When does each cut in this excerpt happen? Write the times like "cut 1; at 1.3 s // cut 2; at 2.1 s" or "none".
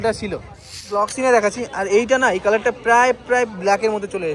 cut 1; at 1.0 s